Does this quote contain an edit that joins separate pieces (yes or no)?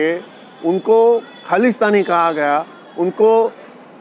no